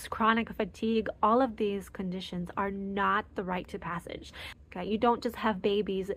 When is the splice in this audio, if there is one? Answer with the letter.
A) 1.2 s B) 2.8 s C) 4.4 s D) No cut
C